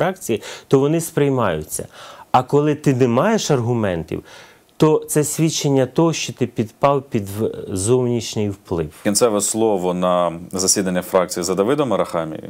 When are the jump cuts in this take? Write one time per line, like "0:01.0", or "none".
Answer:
0:09.0

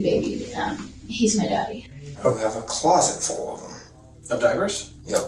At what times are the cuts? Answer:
0:02.3

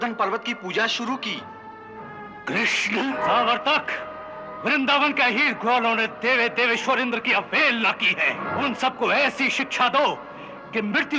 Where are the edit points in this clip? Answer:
0:03.2
0:08.5

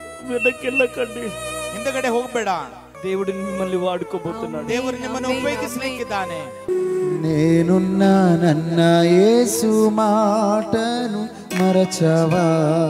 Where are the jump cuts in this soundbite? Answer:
0:02.9
0:06.7

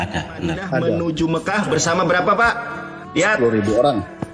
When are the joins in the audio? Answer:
0:00.9

